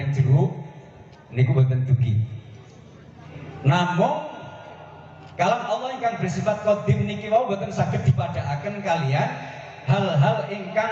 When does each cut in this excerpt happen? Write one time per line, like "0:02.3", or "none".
0:03.2

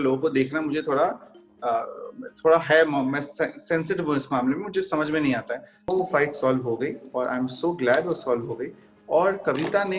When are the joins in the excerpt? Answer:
0:05.9

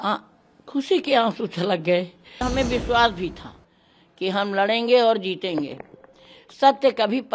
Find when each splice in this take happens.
0:02.4

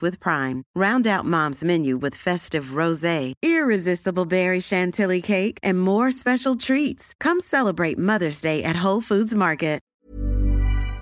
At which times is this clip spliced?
0:09.9

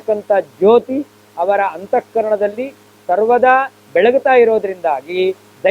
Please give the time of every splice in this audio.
none

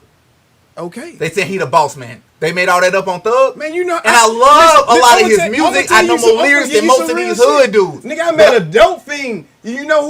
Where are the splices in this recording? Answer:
none

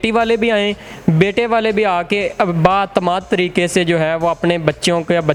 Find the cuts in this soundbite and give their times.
none

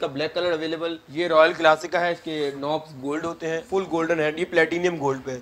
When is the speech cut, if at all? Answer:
0:01.0
0:03.6

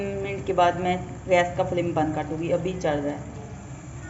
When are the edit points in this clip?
none

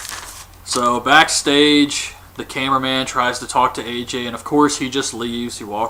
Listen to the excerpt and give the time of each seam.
none

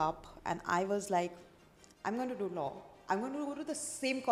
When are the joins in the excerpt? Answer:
none

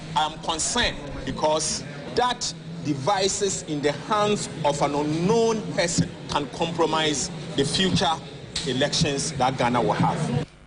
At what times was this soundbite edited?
0:01.1
0:02.0
0:06.2
0:07.4

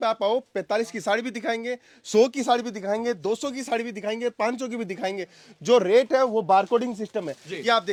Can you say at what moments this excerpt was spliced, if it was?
none

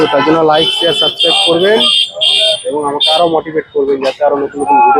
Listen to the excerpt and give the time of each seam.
none

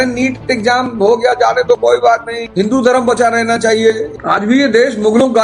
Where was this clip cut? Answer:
0:02.4
0:04.1

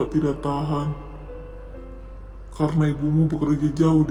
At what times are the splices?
none

